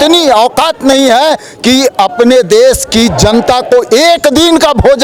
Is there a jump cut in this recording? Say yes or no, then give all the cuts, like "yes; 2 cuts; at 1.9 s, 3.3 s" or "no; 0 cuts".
no; 0 cuts